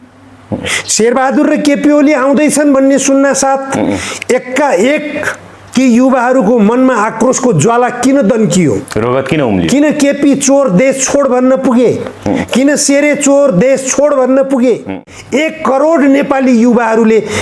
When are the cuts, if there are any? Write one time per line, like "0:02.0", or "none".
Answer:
0:15.1